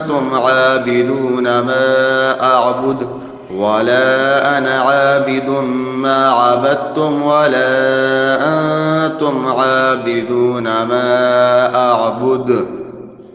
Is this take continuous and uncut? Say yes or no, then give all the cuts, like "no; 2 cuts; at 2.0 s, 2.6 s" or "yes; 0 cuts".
yes; 0 cuts